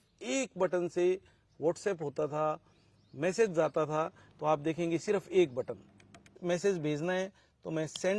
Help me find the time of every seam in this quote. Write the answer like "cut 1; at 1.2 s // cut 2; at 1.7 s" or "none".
cut 1; at 6.4 s